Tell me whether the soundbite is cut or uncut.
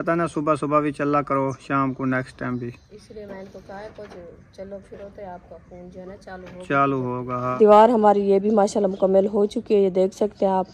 cut